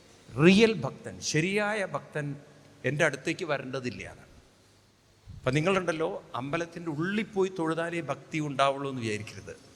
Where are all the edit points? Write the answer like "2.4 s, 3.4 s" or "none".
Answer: none

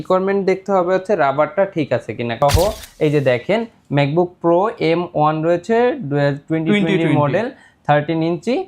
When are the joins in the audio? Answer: 2.4 s

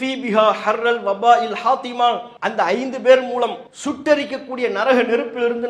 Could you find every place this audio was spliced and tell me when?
2.3 s, 3.7 s

